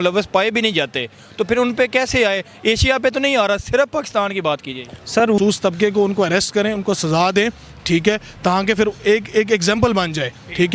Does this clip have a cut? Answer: yes; 1 cut; at 5.4 s

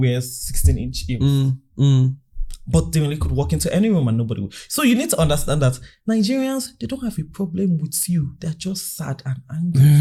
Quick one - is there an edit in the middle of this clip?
no; 0 cuts

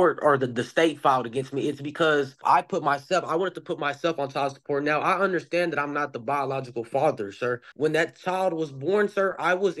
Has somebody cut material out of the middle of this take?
yes; 2 cuts; at 2.4 s, 7.7 s

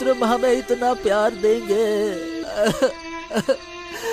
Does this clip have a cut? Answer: yes; 1 cut; at 2.4 s

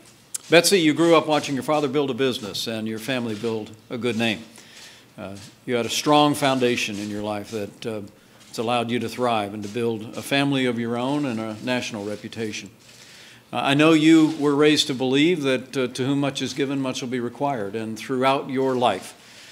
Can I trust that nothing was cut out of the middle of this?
no; 1 cut; at 17.4 s

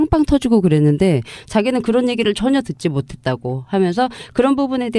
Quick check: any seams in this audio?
yes; 1 cut; at 2.0 s

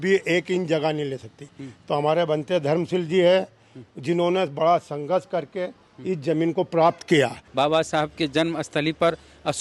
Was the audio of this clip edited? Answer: yes; 1 cut; at 7.4 s

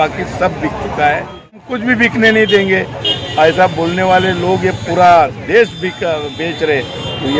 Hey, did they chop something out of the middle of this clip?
yes; 1 cut; at 1.6 s

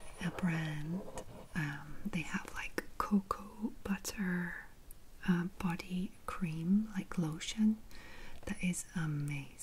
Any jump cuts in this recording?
no; 0 cuts

